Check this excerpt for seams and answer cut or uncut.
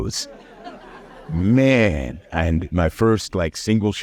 uncut